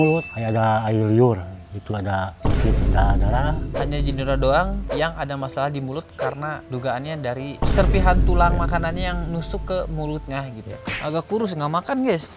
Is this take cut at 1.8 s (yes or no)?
no